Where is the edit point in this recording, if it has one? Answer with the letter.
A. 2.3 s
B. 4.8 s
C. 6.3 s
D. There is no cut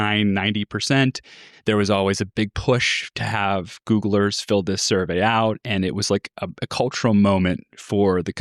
A